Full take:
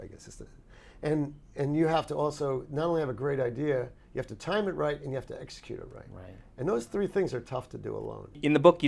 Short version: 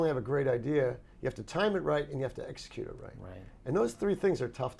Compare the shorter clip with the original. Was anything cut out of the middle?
no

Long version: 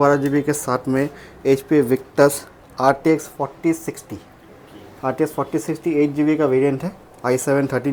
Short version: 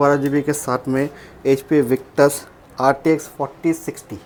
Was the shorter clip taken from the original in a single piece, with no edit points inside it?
yes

